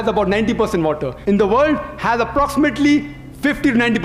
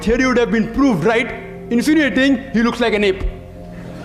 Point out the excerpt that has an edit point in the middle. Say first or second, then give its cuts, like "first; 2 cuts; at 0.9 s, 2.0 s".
first; 1 cut; at 1.1 s